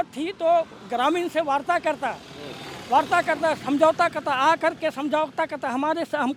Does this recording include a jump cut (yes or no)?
no